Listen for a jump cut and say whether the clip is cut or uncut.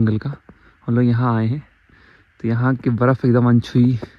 uncut